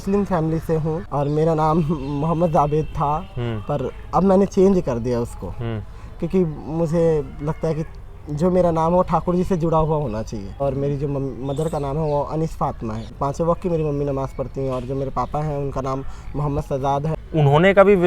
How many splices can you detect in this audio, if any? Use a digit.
4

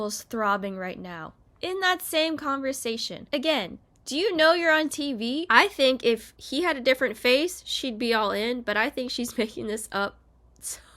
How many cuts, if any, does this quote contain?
1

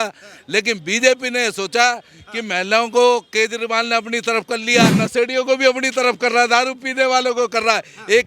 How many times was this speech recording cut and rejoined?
1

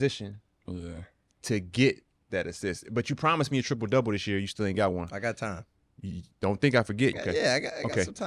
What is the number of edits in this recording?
1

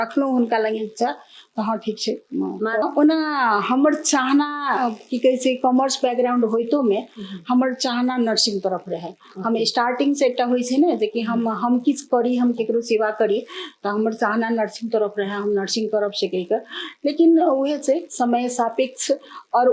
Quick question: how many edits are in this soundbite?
1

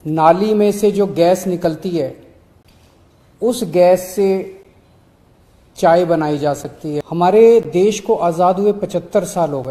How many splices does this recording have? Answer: 1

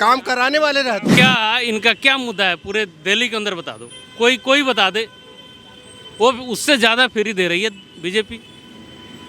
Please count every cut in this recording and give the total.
1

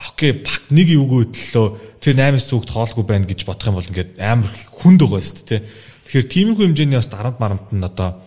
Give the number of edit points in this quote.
0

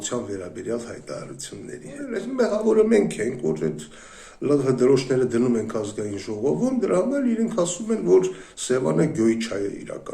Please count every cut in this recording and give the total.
1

